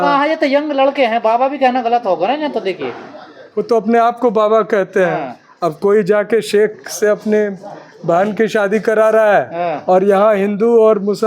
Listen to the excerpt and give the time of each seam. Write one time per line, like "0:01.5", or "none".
none